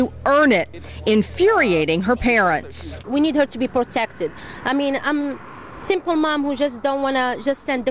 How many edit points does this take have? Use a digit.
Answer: 1